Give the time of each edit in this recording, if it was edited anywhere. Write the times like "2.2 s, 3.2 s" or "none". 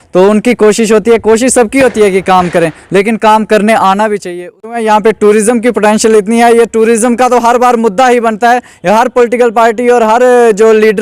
4.7 s